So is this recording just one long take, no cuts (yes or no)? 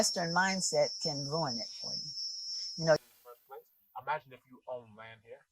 no